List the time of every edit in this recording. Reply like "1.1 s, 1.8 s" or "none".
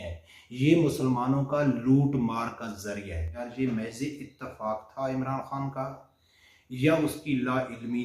3.4 s